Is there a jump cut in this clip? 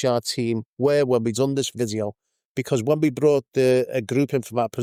no; 0 cuts

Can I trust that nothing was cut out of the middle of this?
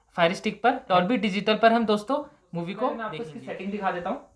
no; 1 cut; at 3.2 s

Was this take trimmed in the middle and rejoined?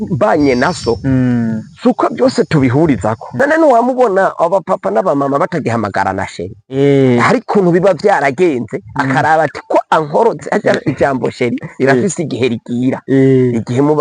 yes; 1 cut; at 3.3 s

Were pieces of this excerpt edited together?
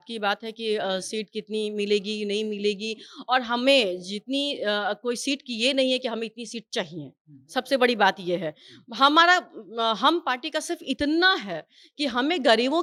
no; 0 cuts

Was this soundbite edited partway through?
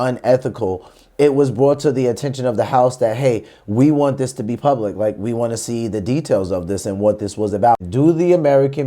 yes; 1 cut; at 7.8 s

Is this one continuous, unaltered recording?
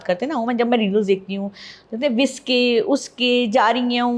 yes; 0 cuts

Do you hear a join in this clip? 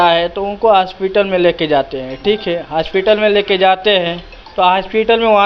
no; 0 cuts

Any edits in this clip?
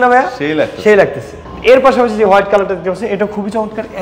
no; 0 cuts

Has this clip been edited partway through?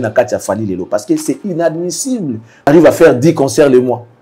yes; 1 cut; at 2.7 s

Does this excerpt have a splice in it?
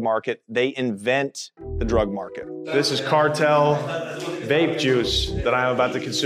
yes; 1 cut; at 2.5 s

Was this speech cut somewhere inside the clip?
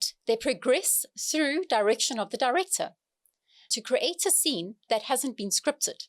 yes; 1 cut; at 3.7 s

